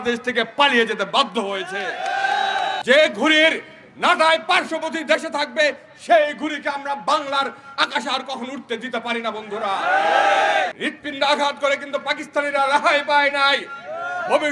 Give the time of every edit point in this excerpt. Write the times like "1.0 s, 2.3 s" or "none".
2.8 s, 10.8 s